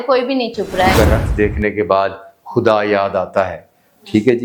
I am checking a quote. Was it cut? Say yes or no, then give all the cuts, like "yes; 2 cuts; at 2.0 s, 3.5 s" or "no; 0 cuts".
yes; 1 cut; at 0.9 s